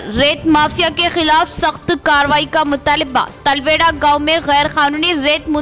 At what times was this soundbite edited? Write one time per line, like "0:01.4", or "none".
none